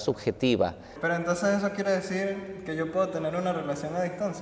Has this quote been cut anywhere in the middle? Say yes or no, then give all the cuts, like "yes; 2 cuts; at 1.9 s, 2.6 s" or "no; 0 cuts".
yes; 1 cut; at 0.9 s